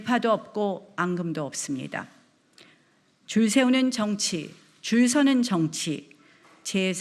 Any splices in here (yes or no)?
no